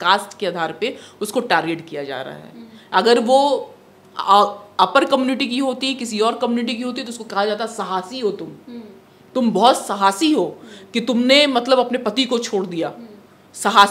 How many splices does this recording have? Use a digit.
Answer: 0